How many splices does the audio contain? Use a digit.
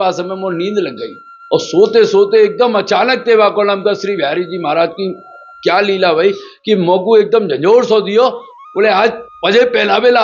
2